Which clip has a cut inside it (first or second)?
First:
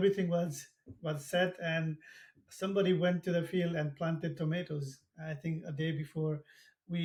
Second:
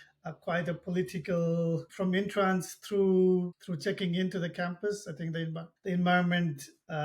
second